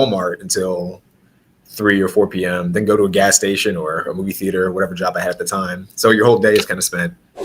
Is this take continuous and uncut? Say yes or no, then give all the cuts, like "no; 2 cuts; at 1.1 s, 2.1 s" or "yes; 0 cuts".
yes; 0 cuts